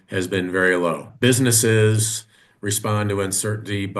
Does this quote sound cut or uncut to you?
cut